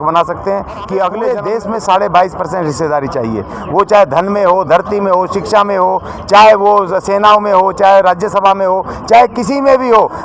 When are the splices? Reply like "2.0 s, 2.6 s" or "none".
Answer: 1.3 s